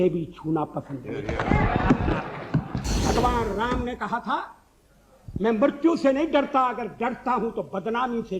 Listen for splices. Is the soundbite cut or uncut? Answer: cut